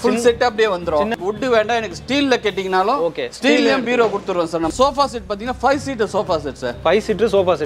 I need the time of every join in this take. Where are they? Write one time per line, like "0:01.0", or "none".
0:01.1
0:04.7